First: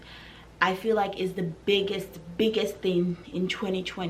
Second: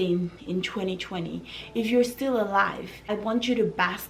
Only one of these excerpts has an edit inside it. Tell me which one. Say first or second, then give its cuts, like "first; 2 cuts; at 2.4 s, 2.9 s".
second; 1 cut; at 3.0 s